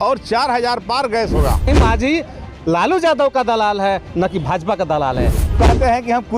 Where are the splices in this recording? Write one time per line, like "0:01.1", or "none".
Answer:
0:01.7
0:05.4